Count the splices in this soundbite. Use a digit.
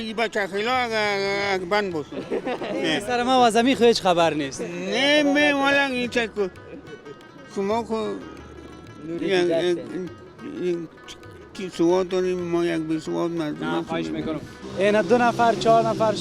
1